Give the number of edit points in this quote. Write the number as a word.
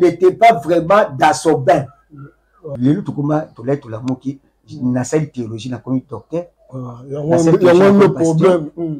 one